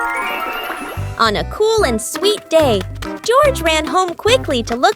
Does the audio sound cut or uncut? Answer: cut